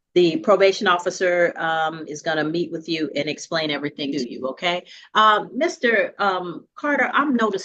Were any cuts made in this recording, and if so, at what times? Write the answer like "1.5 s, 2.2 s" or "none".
4.1 s